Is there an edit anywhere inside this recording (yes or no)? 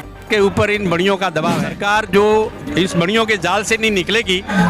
yes